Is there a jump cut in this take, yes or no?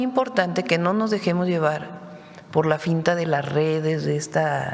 no